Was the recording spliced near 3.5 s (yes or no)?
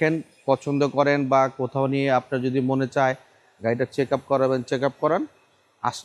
no